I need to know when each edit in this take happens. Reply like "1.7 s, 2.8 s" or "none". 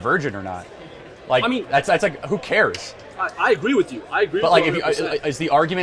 none